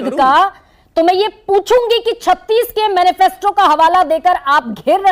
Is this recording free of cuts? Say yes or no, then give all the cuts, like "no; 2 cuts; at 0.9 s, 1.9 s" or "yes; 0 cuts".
yes; 0 cuts